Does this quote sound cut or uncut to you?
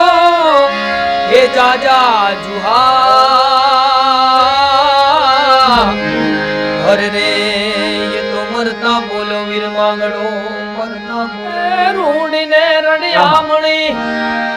cut